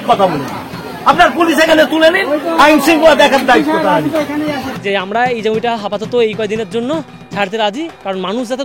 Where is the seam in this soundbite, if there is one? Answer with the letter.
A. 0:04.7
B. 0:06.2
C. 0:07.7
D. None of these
A